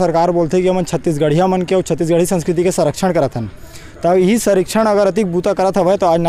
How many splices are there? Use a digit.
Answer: 0